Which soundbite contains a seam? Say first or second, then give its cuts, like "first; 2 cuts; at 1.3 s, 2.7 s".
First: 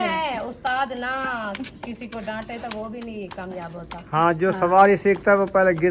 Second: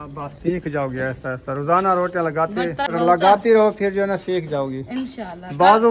second; 1 cut; at 2.9 s